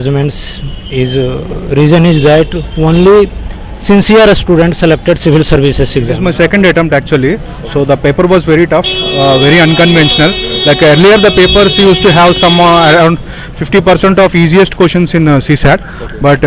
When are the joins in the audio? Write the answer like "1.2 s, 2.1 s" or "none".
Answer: 6.1 s